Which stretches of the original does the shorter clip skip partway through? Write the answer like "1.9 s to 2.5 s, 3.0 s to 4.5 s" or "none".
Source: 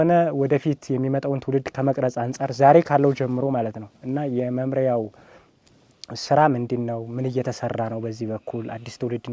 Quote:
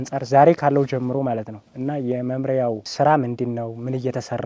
5.1 s to 6.2 s